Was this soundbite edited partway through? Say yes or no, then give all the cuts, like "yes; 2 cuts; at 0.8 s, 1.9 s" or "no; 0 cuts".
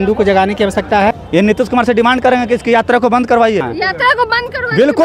yes; 2 cuts; at 1.2 s, 3.7 s